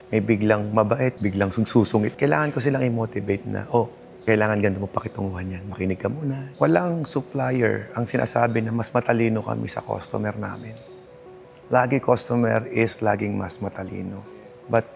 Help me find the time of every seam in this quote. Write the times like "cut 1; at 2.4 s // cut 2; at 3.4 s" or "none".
cut 1; at 2.1 s // cut 2; at 6.4 s